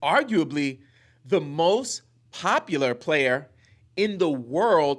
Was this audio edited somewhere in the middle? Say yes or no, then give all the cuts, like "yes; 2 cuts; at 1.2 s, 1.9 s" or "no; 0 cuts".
no; 0 cuts